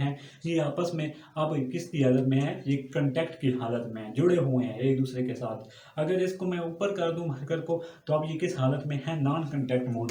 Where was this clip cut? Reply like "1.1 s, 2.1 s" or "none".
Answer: none